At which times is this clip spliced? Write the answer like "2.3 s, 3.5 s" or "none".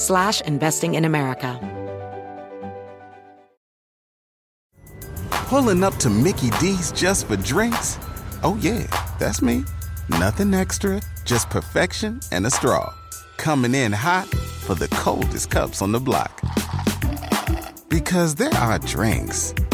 1.6 s